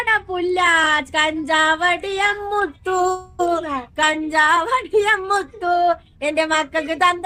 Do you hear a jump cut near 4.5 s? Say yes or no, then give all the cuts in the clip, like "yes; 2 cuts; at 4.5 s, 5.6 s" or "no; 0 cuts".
no; 0 cuts